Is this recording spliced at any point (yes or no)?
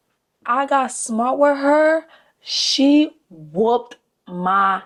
no